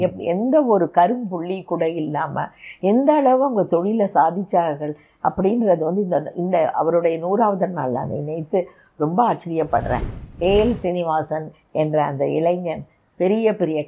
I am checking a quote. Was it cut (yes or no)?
yes